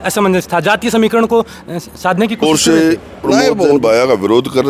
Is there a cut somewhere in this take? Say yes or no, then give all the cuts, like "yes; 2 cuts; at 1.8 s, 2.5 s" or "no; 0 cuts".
yes; 1 cut; at 2.4 s